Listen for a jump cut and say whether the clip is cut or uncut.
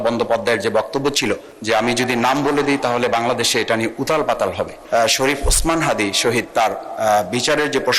cut